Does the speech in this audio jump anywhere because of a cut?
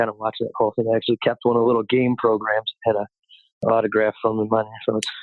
yes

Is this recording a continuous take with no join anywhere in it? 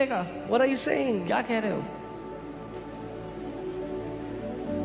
yes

